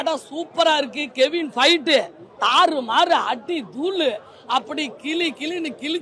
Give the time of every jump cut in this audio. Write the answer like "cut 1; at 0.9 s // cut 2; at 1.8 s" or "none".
none

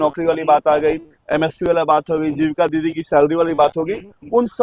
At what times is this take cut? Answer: none

